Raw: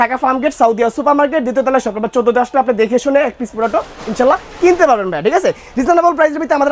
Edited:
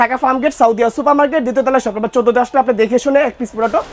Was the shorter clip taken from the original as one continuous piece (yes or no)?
yes